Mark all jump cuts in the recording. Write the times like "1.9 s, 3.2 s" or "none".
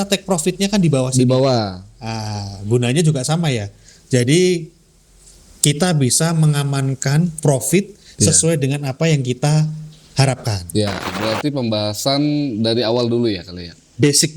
11.1 s